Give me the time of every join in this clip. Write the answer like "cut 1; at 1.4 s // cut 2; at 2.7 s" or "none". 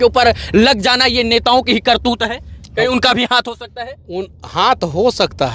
none